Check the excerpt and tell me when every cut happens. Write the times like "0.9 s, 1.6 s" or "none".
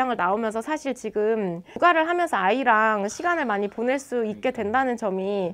none